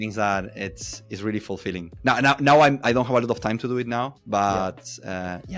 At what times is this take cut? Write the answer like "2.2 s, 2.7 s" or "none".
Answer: none